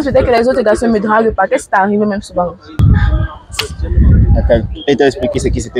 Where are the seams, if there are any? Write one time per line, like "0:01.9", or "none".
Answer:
0:02.8